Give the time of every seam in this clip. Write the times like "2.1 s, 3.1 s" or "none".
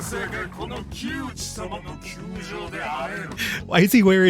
3.4 s